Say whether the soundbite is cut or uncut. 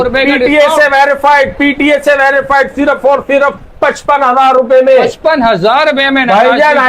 uncut